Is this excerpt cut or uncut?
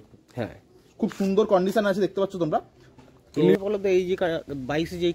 cut